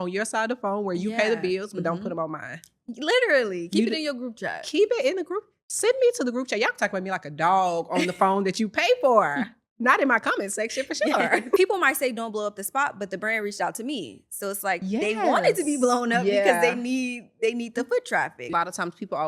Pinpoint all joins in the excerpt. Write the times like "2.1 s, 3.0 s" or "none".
11.6 s, 18.5 s